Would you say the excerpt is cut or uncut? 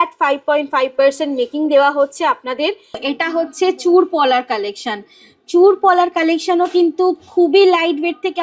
cut